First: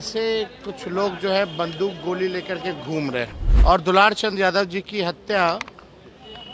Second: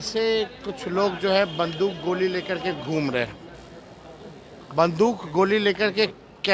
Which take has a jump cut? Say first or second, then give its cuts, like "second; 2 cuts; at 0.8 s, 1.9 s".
first; 1 cut; at 3.4 s